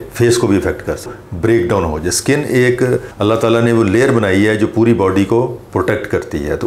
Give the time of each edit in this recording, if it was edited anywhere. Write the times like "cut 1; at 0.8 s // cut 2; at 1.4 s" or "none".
cut 1; at 1.1 s